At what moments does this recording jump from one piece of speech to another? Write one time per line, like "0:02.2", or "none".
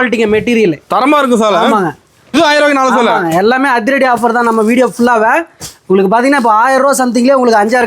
0:02.3